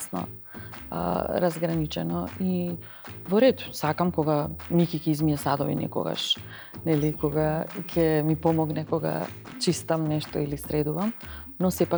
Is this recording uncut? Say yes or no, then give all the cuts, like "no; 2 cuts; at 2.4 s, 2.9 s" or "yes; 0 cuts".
yes; 0 cuts